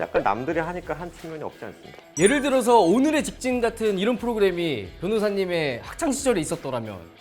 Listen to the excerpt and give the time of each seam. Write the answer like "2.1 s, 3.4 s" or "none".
2.1 s